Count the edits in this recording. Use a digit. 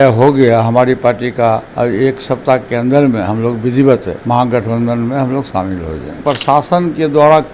3